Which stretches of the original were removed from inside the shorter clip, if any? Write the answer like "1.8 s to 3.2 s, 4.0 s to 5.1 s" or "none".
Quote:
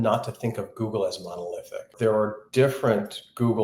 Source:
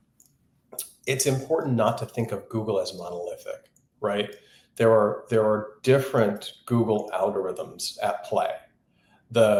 3.6 s to 5.2 s